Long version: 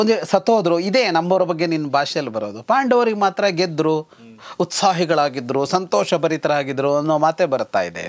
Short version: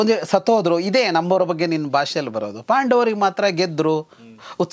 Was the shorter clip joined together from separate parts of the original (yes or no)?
no